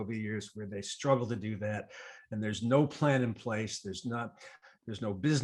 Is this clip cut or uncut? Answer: uncut